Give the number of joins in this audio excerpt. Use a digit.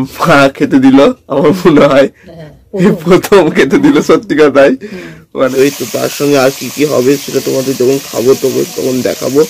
1